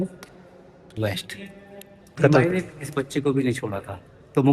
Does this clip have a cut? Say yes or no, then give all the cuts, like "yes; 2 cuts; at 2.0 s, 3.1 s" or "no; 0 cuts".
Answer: yes; 1 cut; at 2.2 s